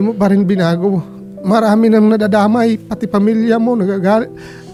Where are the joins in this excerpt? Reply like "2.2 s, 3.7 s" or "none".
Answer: none